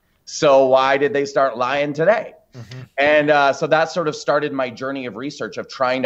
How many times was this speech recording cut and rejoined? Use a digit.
0